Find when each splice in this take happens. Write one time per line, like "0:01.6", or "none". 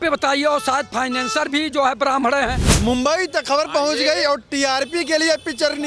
0:02.7

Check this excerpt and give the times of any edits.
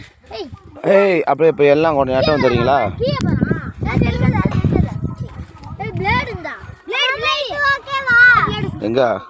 0:07.0

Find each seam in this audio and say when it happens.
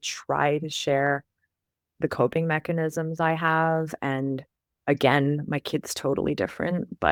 none

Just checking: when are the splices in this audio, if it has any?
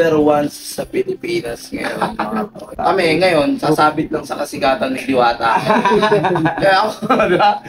0:02.7

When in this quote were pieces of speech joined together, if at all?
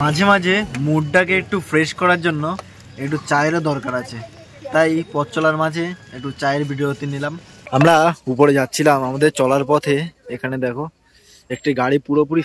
0:07.7

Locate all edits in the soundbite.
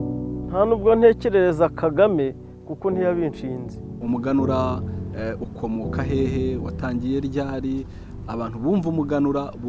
0:04.0

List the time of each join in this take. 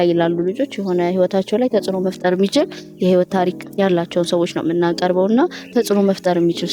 0:03.6

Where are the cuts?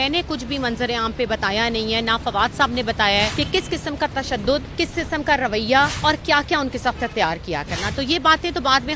0:03.3
0:04.7
0:05.9

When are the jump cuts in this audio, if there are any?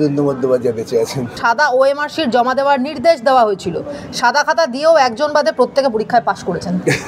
none

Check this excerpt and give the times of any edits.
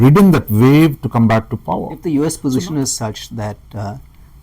0:01.9

